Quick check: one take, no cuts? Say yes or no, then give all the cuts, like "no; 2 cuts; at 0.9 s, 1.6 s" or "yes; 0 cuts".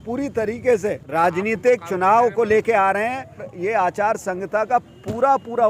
no; 2 cuts; at 1.0 s, 3.5 s